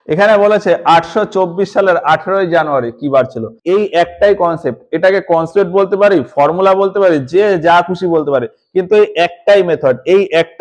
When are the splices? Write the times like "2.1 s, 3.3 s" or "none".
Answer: 3.5 s